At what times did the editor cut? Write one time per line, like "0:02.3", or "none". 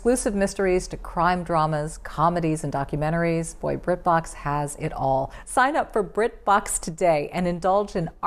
0:05.4